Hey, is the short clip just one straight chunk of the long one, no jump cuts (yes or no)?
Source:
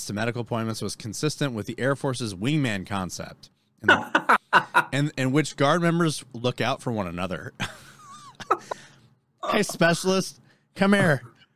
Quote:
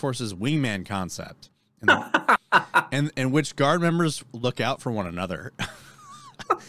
yes